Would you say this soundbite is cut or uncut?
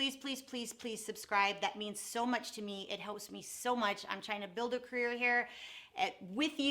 uncut